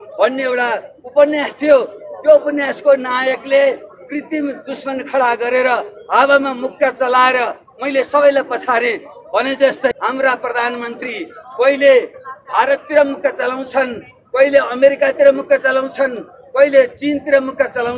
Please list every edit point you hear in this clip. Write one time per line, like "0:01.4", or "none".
0:09.9